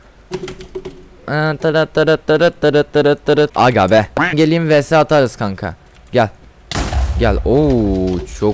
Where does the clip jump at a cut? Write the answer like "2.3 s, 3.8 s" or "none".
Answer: 4.2 s